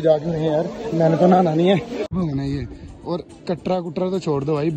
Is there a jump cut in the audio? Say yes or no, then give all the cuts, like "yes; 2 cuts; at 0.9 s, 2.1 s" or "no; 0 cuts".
yes; 1 cut; at 2.1 s